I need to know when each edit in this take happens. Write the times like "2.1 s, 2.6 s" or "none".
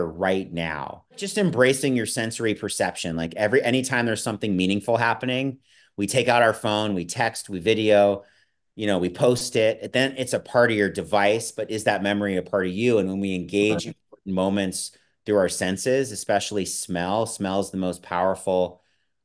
1.2 s